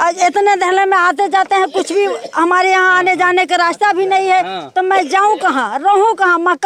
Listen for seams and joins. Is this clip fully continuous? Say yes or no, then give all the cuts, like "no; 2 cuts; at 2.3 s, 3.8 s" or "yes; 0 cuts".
yes; 0 cuts